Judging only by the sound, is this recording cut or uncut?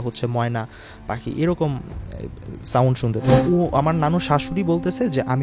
cut